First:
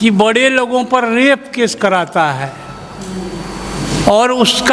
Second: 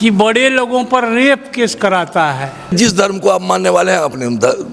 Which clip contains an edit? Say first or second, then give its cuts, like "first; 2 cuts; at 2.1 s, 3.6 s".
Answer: second; 1 cut; at 2.7 s